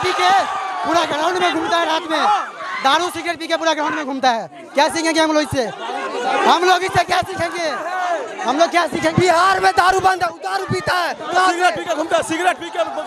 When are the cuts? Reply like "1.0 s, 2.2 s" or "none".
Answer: none

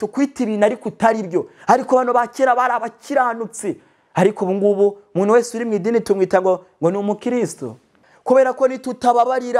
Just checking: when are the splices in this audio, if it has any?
8.1 s

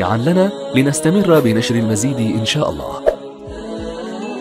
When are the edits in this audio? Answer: 3.2 s

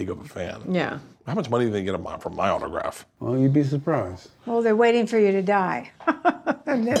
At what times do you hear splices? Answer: 3.1 s

